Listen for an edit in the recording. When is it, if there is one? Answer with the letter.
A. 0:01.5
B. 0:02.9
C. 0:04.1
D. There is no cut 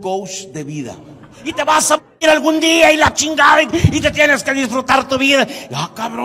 A